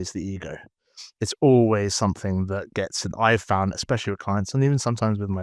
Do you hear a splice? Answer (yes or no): no